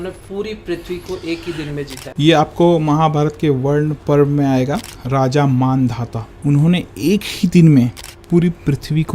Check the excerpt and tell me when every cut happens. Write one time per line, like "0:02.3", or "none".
0:02.0
0:04.0
0:04.9
0:06.3
0:08.1